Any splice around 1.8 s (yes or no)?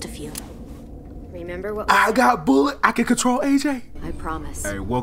no